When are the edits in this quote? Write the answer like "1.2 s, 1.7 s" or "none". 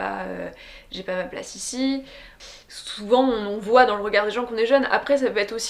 2.2 s